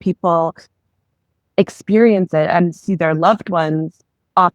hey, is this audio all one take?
yes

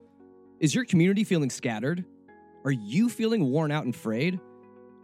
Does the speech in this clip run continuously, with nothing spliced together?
yes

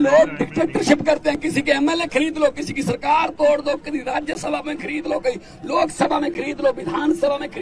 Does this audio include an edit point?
no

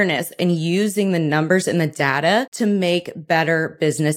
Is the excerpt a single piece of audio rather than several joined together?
no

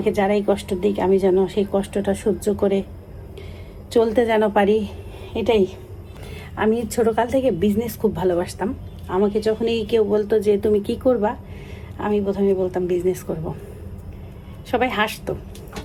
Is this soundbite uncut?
yes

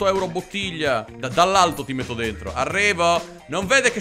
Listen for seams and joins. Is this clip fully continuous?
no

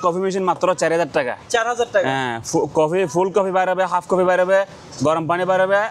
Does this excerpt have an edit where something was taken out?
no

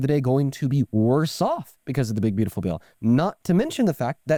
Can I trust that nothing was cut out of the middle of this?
yes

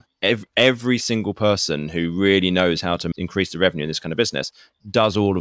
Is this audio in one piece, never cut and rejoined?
no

